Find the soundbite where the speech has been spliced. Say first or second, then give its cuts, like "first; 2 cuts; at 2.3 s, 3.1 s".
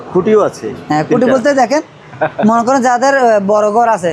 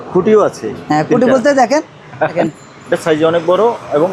second; 1 cut; at 2.4 s